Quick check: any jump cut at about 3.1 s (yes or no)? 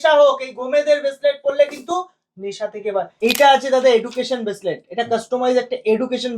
yes